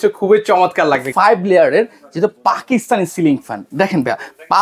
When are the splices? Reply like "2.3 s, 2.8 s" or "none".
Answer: 1.1 s